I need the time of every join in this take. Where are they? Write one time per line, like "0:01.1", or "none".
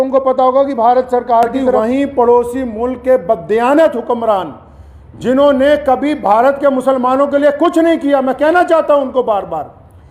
0:01.8

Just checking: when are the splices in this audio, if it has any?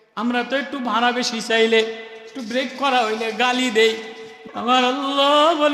0:04.4

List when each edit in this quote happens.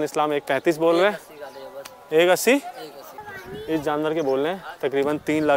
0:03.3

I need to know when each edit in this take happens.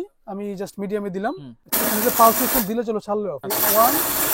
0:01.5
0:03.4

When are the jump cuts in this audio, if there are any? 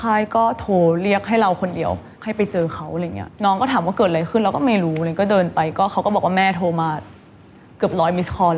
0:02.1
0:03.2

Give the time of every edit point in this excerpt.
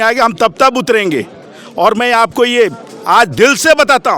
none

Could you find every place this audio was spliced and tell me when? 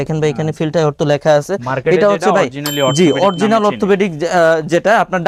none

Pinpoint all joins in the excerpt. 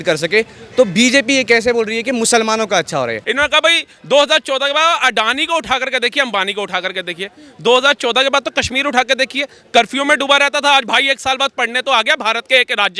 0:03.2

